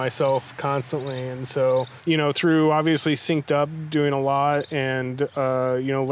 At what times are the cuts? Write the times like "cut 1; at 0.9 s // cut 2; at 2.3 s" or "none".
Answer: cut 1; at 1.9 s